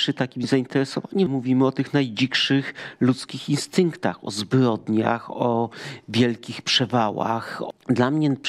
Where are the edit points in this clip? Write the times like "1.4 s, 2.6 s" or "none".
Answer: 1.3 s, 7.6 s